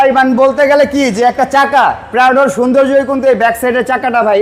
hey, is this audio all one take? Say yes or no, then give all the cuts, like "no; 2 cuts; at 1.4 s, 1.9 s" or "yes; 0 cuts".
yes; 0 cuts